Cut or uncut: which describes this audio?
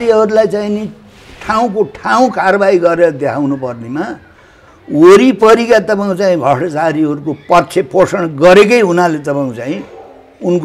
uncut